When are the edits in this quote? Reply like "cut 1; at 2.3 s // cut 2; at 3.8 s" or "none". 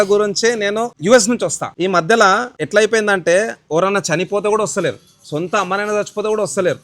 cut 1; at 0.9 s // cut 2; at 1.6 s // cut 3; at 2.5 s